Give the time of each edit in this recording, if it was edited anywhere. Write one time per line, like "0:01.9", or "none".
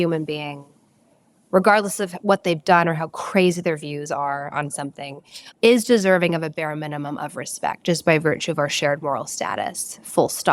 none